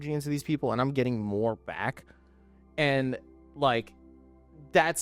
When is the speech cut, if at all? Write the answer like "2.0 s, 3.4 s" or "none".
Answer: none